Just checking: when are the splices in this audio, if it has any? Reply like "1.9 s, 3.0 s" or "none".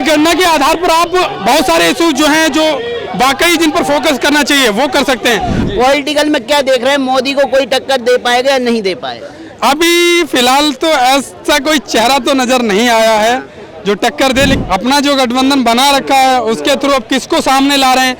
5.6 s, 14.6 s